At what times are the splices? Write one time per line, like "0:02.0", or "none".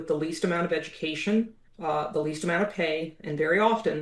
0:01.6

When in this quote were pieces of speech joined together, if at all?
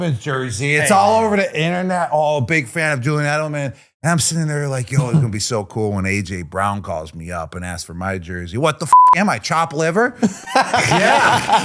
none

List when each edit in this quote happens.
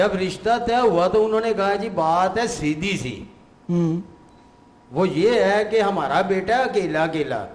none

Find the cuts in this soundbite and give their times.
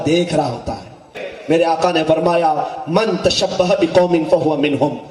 0:01.1

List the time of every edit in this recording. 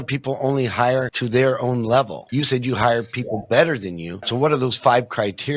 0:01.2
0:02.2
0:04.2

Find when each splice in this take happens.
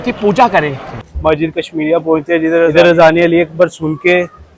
0:00.9
0:02.7

